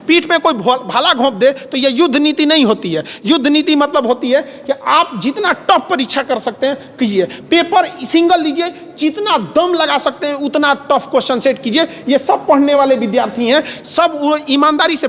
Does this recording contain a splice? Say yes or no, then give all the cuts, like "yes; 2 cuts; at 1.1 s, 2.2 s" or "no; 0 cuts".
no; 0 cuts